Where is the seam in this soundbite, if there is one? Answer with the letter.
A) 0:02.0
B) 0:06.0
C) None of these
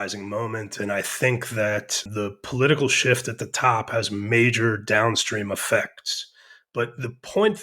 A